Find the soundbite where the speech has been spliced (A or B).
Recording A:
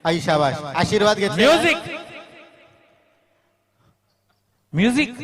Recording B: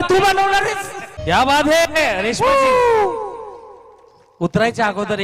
B